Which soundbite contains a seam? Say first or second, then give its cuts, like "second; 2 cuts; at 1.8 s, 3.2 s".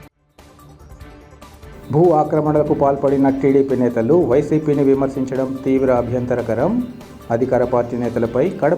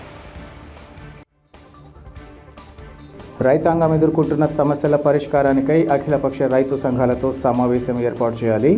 first; 1 cut; at 1.5 s